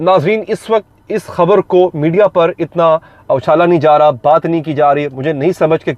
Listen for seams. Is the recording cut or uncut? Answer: uncut